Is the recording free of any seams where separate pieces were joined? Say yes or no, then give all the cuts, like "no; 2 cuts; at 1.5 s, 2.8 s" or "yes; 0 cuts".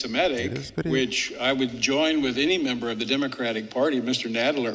yes; 0 cuts